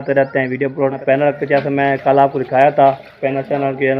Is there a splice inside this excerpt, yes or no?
yes